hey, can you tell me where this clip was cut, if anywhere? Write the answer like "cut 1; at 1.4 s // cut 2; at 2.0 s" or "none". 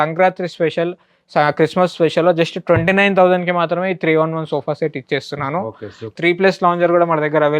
cut 1; at 6.1 s